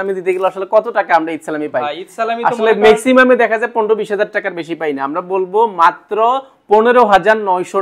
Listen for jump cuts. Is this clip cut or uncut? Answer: uncut